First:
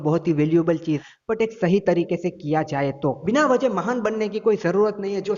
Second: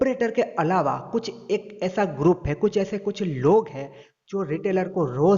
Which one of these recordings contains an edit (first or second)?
first